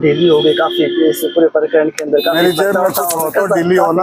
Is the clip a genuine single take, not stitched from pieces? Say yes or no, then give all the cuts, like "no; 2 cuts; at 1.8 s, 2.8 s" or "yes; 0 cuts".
yes; 0 cuts